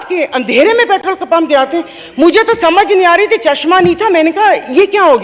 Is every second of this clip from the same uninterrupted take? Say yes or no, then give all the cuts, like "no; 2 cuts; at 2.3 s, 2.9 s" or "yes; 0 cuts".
yes; 0 cuts